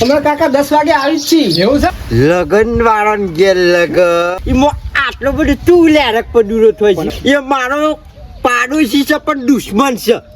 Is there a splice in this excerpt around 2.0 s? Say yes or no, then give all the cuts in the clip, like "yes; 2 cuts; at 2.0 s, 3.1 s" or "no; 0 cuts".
yes; 2 cuts; at 2.0 s, 7.1 s